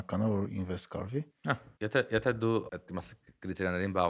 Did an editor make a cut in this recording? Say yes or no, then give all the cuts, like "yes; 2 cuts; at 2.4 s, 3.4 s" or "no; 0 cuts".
yes; 2 cuts; at 1.4 s, 2.8 s